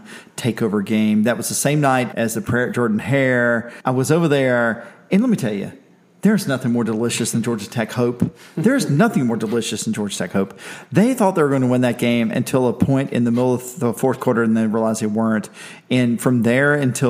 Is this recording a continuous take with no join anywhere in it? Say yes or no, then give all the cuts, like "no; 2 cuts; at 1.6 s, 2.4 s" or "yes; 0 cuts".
no; 2 cuts; at 2.1 s, 3.7 s